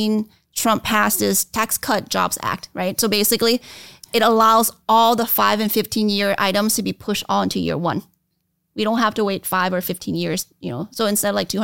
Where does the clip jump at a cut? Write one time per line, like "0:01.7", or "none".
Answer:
0:01.5